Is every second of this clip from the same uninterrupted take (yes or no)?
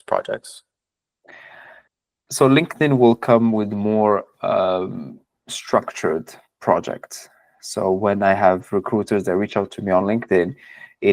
yes